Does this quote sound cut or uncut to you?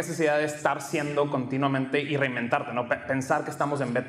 uncut